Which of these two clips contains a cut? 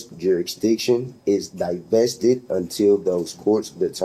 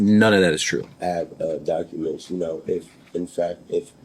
second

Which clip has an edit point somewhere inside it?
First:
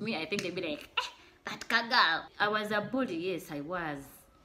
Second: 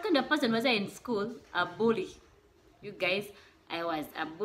first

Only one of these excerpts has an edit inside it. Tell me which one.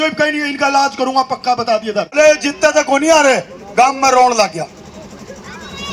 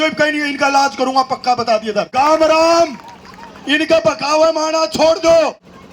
first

